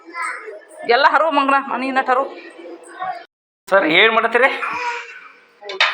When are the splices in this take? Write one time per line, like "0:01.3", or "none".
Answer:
0:03.5

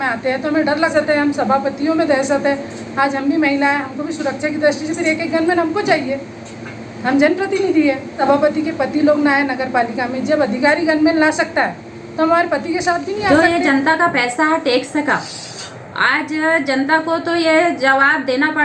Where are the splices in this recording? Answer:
0:00.9
0:08.1
0:13.3

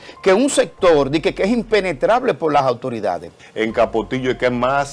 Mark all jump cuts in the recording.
0:03.4

